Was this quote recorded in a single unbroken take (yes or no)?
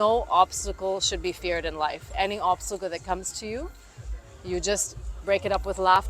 yes